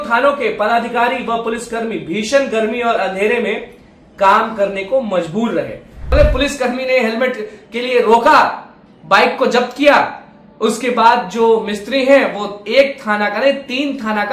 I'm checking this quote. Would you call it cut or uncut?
cut